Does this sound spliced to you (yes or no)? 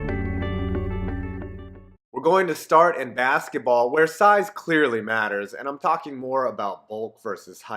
yes